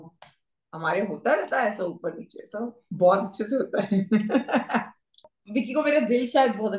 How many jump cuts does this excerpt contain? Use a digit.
1